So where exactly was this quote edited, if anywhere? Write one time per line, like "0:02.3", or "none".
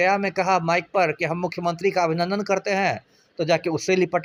none